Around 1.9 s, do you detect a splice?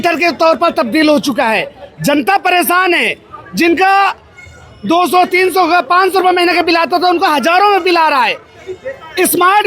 no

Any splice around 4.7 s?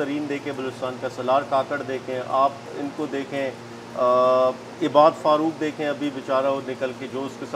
no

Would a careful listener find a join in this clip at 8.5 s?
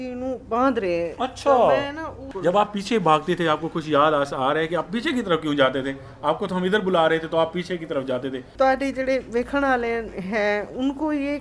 yes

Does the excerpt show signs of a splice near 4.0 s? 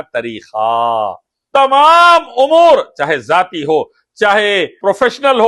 no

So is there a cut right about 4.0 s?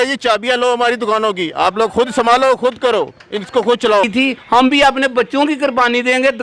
yes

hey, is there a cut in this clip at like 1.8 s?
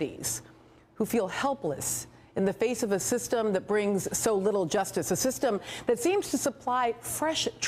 no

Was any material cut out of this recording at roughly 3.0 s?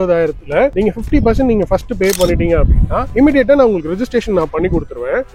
no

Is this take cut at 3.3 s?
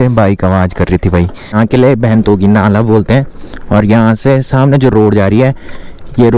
no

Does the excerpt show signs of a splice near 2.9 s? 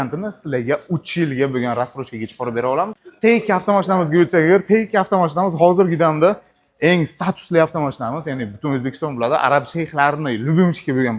yes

